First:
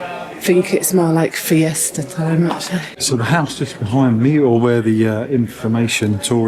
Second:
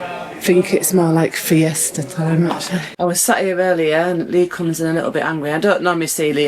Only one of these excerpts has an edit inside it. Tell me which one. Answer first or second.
second